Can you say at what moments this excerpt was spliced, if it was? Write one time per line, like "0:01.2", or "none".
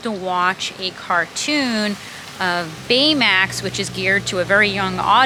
none

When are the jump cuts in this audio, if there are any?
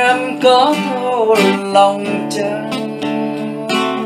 none

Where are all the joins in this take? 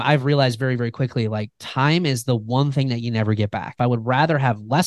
0:03.8

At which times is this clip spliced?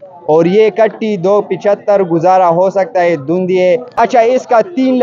0:03.9

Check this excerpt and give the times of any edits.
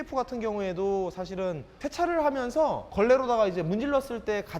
0:01.8

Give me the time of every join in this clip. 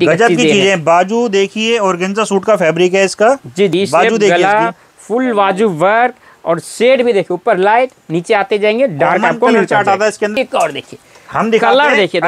0:03.7
0:10.3

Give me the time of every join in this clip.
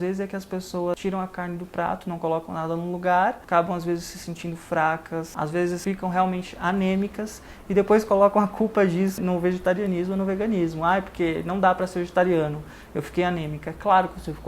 0:00.9
0:03.4
0:05.7
0:09.2

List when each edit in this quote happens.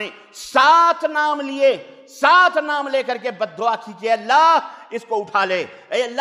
none

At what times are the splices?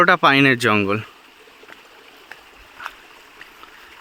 none

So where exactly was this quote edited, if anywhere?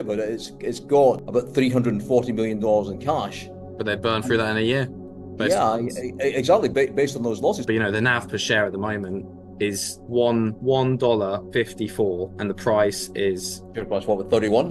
0:07.6

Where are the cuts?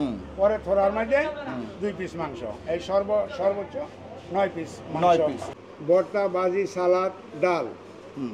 0:05.5

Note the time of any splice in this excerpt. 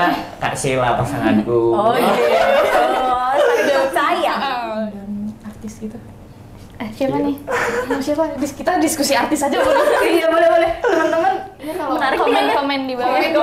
0:04.6

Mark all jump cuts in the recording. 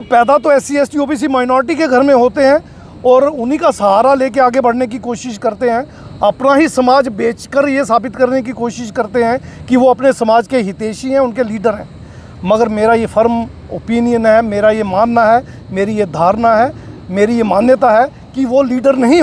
none

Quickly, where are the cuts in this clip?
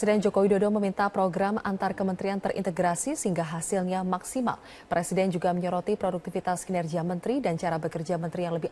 0:01.6

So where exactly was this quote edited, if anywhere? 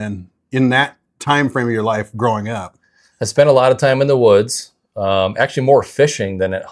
none

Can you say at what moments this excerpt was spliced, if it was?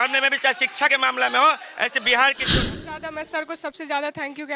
0:02.9

